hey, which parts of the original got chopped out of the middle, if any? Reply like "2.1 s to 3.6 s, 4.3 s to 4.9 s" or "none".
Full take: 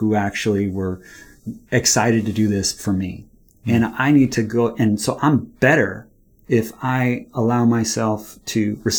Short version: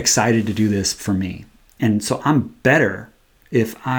3.6 s to 4.7 s